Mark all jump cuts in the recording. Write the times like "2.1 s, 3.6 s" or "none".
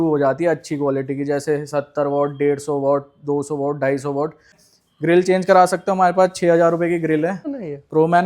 4.6 s, 7.4 s